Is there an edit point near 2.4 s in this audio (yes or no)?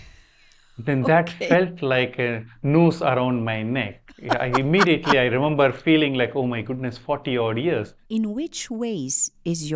no